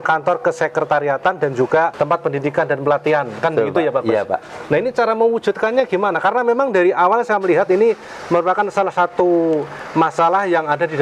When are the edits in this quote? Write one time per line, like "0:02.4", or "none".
0:01.9